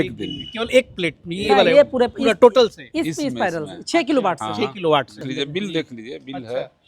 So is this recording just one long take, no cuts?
no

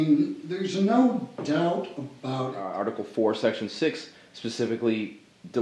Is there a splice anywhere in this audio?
yes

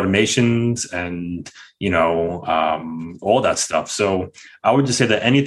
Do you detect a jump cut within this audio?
no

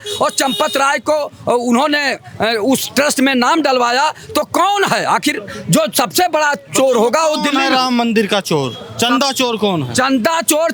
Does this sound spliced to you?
no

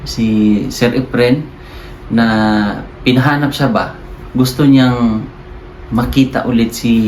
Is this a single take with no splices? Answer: yes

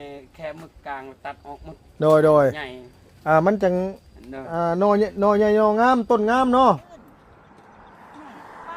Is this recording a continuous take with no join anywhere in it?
no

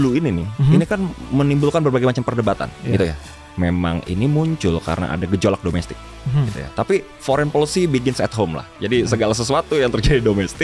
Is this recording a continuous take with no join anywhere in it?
no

